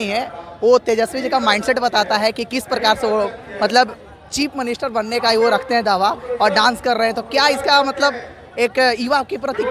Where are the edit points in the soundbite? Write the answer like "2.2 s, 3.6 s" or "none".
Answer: none